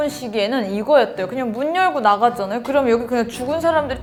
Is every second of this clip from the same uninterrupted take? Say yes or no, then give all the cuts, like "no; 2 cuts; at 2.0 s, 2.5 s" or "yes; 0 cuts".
yes; 0 cuts